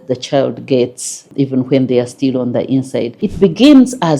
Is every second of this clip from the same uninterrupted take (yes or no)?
no